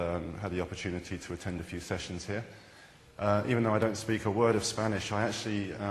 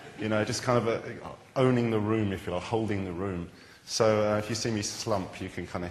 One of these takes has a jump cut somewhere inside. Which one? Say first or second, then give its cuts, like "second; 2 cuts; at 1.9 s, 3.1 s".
second; 1 cut; at 1.5 s